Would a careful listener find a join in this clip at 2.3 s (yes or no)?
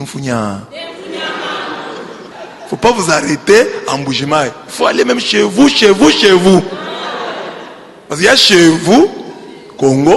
yes